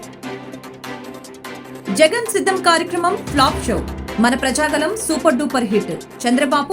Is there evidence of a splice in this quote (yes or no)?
yes